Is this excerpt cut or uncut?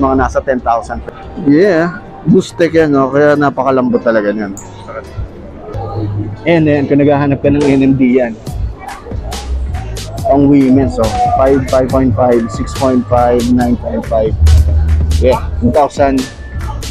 cut